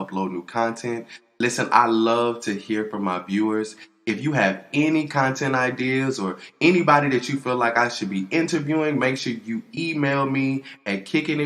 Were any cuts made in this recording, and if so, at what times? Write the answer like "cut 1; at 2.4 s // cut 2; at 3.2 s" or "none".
none